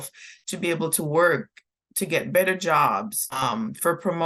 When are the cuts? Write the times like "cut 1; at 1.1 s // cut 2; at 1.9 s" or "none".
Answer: cut 1; at 3.3 s